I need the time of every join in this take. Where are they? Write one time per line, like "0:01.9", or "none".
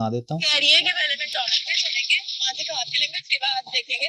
none